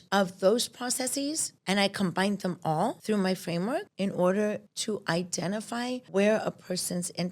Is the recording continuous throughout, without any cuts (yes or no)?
no